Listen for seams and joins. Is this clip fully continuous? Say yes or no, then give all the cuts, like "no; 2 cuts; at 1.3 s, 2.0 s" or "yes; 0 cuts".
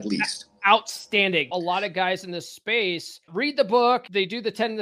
no; 3 cuts; at 1.5 s, 3.3 s, 4.1 s